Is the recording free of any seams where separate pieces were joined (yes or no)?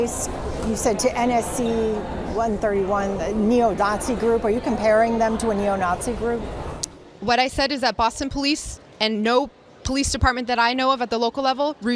yes